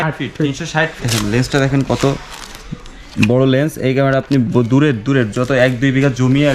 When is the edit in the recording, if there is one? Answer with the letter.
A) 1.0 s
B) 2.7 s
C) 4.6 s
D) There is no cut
A